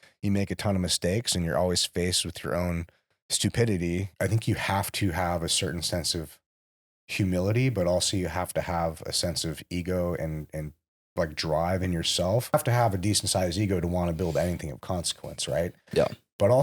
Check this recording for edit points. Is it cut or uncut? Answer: cut